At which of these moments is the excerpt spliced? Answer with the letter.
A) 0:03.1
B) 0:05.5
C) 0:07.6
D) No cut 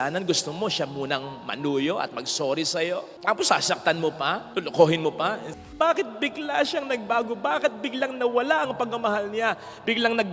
B